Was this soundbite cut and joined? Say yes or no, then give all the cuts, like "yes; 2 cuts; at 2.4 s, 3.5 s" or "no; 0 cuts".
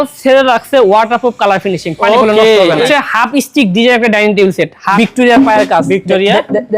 yes; 2 cuts; at 2.8 s, 5.0 s